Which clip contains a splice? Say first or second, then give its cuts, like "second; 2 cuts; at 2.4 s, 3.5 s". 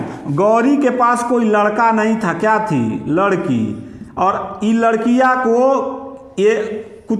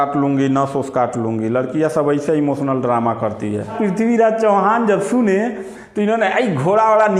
second; 1 cut; at 3.7 s